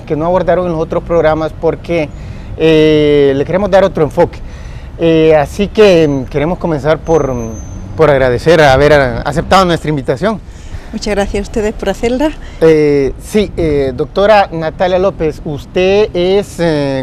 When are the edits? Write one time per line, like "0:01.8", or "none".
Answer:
none